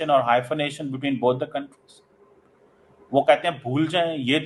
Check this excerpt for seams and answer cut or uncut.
uncut